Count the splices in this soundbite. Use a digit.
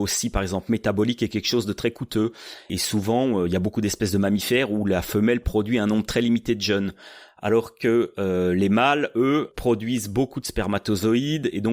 2